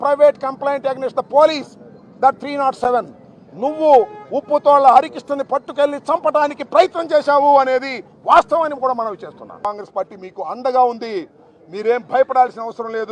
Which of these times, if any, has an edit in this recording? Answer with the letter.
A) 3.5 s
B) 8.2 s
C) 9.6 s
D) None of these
C